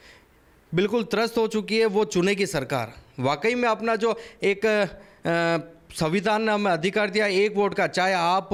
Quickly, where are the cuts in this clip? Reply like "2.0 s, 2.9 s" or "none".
none